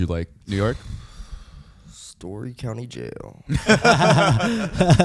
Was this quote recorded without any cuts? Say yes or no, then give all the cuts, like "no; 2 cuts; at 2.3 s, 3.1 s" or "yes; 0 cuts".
yes; 0 cuts